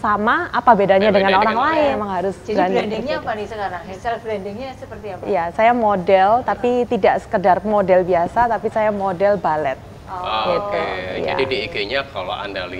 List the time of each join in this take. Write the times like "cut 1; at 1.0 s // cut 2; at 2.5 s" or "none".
cut 1; at 1.9 s // cut 2; at 3.9 s